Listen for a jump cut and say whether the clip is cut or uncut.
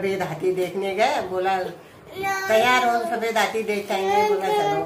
uncut